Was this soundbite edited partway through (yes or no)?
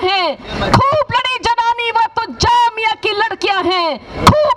no